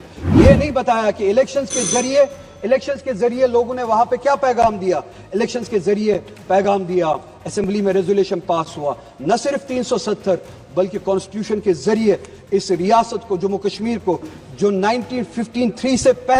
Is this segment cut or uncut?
uncut